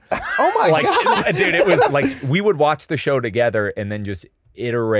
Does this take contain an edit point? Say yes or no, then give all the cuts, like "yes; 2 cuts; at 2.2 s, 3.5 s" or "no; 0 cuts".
yes; 1 cut; at 1.9 s